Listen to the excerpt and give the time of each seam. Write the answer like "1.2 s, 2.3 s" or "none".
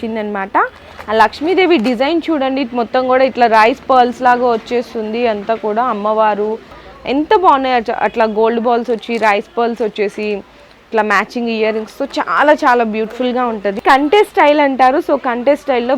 6.7 s, 13.8 s